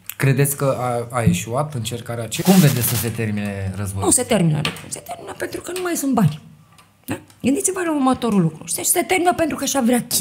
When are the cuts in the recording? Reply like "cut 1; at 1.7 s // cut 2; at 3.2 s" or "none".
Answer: cut 1; at 2.3 s